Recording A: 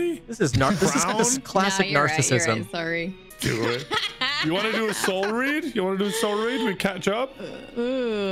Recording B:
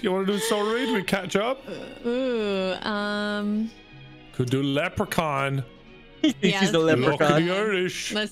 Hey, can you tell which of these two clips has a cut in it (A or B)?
A